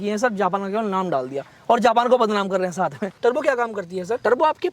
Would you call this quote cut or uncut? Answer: cut